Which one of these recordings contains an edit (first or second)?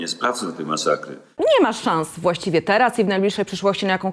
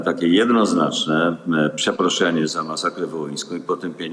first